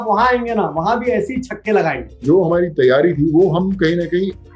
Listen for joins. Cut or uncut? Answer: cut